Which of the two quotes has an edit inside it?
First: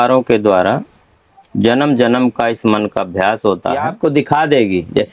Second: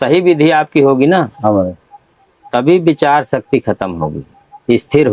first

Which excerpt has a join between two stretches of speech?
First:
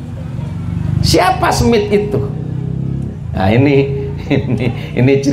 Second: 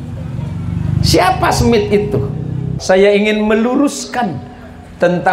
second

